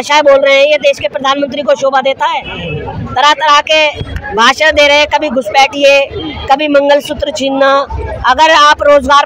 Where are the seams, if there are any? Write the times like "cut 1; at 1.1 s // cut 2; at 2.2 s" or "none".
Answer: none